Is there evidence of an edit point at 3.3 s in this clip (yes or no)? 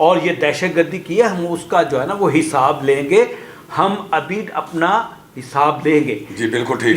no